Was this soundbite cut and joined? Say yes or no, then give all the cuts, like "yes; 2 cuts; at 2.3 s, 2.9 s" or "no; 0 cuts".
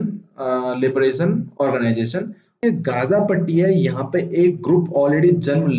yes; 1 cut; at 2.6 s